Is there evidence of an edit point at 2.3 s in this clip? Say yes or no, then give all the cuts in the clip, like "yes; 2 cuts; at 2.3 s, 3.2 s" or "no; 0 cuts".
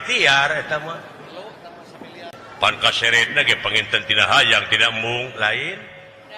yes; 1 cut; at 2.3 s